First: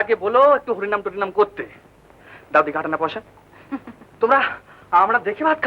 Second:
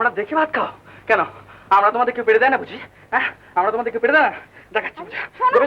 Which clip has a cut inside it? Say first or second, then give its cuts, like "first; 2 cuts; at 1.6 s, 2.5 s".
first; 1 cut; at 4.0 s